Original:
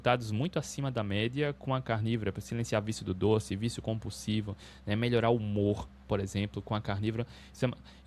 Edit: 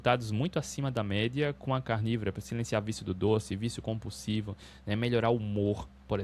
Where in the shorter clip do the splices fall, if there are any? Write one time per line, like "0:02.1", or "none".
none